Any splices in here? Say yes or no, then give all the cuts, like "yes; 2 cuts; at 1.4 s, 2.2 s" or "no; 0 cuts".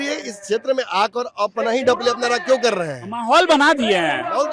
no; 0 cuts